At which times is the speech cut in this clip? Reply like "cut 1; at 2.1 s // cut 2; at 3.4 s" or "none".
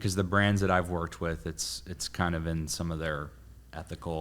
none